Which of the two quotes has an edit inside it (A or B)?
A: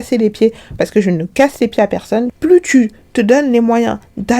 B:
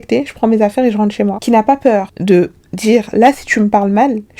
A